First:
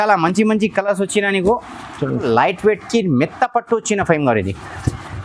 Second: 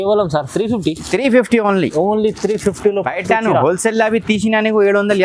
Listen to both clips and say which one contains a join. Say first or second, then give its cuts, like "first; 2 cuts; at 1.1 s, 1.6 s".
first; 1 cut; at 2.2 s